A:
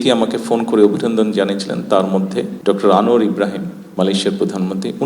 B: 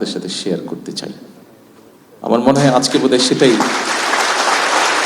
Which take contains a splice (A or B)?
A